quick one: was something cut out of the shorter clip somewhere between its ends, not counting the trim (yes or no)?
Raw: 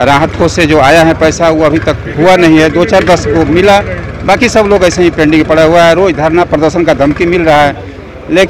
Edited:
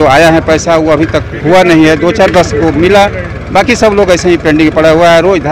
no